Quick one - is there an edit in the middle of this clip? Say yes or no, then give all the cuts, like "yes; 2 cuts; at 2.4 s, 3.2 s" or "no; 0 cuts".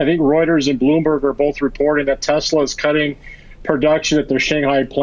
no; 0 cuts